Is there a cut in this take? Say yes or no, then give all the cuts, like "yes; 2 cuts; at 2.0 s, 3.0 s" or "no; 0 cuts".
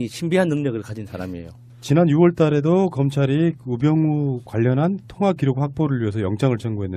yes; 1 cut; at 1.8 s